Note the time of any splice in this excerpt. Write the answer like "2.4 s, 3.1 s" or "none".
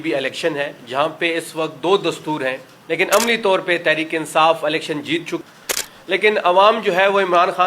2.7 s, 5.4 s